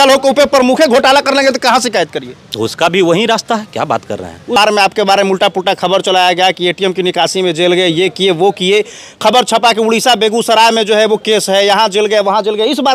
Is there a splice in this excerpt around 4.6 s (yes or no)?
yes